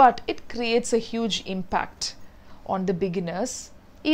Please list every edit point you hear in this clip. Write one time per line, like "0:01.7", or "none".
none

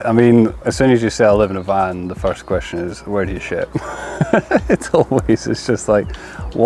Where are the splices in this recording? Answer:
none

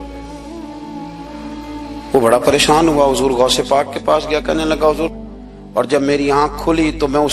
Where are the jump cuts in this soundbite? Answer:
0:05.1

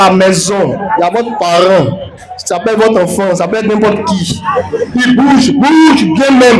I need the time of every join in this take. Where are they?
none

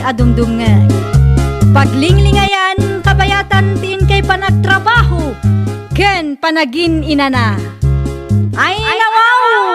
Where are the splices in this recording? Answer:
0:08.6

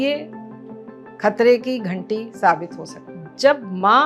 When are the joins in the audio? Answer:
none

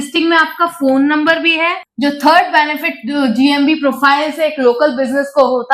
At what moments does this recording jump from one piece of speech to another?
0:01.8

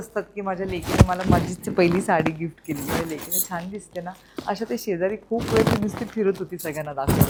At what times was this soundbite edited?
none

